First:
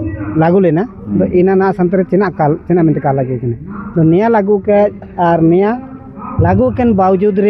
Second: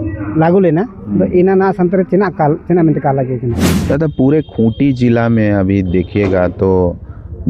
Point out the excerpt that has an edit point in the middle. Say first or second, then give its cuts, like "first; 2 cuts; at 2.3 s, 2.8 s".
second; 1 cut; at 3.7 s